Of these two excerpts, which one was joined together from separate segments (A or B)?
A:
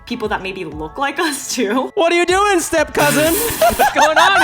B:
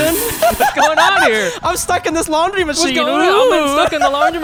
A